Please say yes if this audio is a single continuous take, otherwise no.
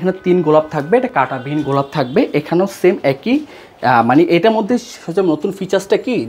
yes